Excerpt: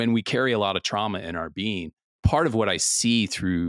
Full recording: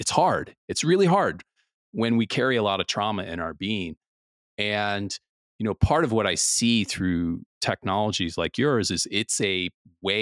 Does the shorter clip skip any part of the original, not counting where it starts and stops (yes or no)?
yes